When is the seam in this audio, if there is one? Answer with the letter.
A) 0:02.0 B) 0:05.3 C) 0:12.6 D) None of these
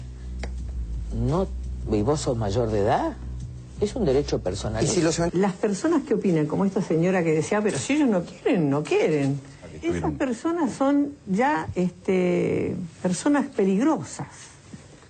B